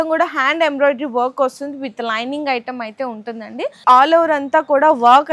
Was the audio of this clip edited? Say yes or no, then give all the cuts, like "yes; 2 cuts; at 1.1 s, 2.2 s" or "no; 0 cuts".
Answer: yes; 1 cut; at 3.8 s